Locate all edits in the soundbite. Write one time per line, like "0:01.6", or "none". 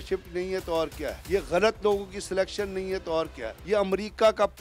0:01.2
0:03.5